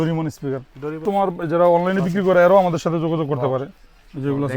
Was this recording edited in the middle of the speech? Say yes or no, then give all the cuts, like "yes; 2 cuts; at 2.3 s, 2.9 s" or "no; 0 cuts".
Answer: yes; 1 cut; at 1.0 s